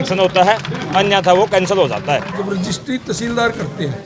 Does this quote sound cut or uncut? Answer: cut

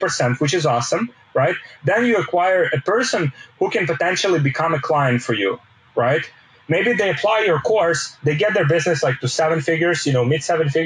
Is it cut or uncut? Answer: uncut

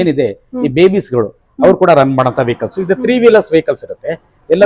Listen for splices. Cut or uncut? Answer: uncut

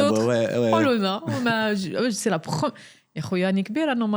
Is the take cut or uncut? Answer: uncut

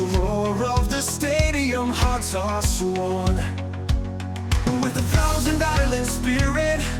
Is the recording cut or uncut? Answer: uncut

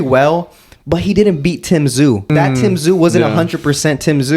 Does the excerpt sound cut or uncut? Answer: cut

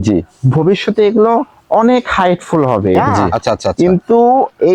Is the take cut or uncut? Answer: cut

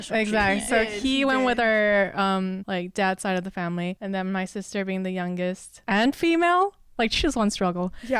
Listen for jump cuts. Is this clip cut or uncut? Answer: cut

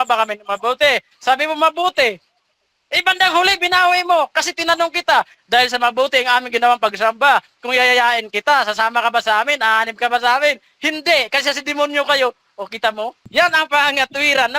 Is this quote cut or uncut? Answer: cut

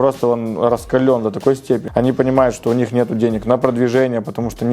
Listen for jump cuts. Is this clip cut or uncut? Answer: cut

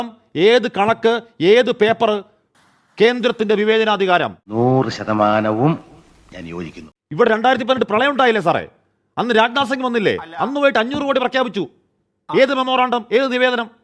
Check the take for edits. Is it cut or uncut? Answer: uncut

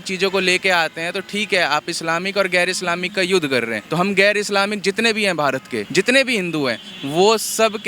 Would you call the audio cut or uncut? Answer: cut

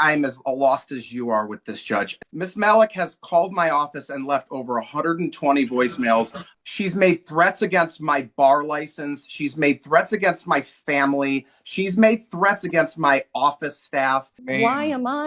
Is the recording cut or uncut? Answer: cut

